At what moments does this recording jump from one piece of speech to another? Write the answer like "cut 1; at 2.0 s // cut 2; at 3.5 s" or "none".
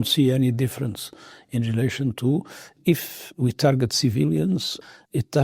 cut 1; at 2.7 s